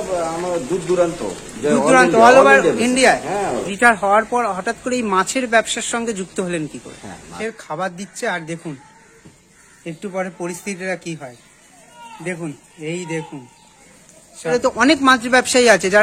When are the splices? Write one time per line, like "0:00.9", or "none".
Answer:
0:03.7
0:07.3
0:14.5